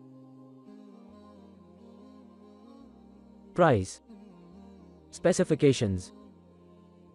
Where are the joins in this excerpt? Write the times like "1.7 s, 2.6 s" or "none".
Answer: none